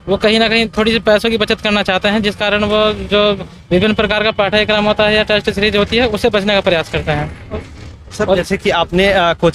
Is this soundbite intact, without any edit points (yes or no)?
yes